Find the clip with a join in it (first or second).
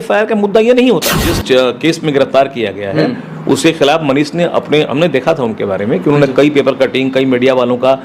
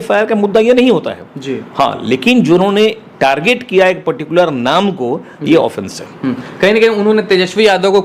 first